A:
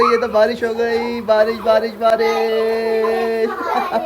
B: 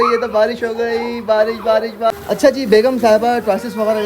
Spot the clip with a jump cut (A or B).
B